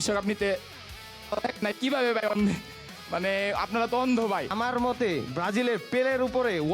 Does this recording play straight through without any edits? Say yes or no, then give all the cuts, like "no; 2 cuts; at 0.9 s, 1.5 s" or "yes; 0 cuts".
no; 1 cut; at 4.5 s